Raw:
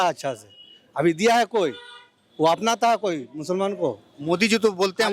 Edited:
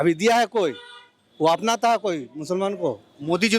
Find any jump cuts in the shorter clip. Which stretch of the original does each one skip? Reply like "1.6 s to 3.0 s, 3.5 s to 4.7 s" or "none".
none